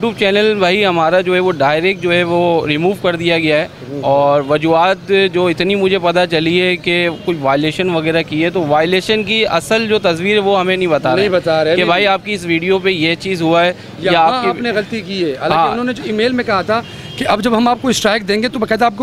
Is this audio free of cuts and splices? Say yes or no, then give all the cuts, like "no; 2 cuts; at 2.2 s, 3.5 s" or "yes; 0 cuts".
yes; 0 cuts